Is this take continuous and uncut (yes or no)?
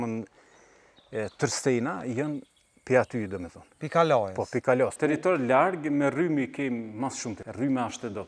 no